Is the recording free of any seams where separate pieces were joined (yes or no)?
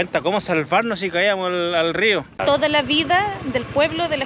no